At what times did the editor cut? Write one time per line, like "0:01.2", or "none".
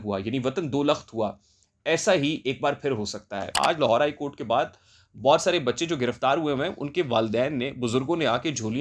0:03.5